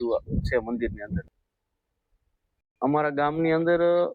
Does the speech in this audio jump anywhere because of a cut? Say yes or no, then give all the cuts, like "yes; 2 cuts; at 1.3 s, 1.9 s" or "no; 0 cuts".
yes; 1 cut; at 1.3 s